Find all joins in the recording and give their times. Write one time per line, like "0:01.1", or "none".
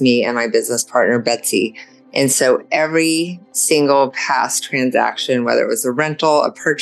none